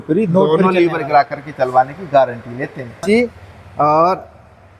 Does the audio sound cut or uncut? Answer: cut